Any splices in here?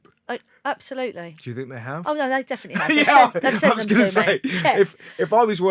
no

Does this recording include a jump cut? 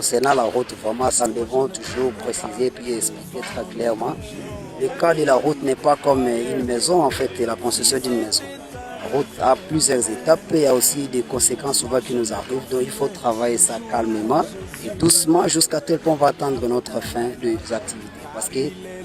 yes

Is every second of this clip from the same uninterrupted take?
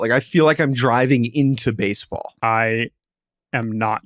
no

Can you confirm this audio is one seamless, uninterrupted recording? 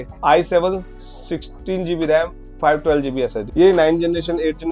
no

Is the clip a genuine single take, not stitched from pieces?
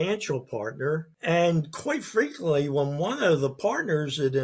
no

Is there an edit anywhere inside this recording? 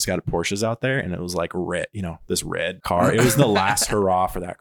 yes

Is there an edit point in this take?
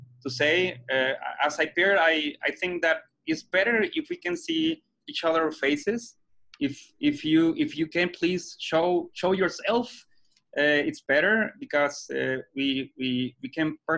no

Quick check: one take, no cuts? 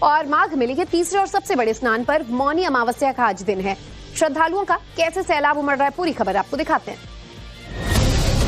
no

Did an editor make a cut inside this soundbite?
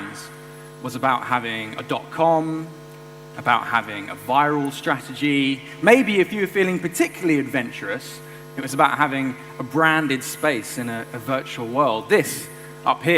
yes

